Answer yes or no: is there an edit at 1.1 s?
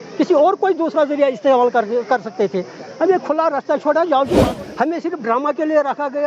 no